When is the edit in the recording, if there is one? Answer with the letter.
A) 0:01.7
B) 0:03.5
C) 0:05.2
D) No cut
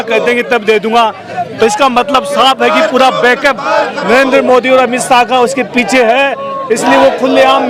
D